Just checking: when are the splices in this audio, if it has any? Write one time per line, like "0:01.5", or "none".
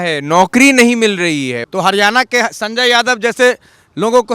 0:01.6